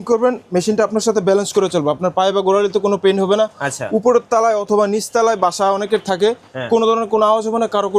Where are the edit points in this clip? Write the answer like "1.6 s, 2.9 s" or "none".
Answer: none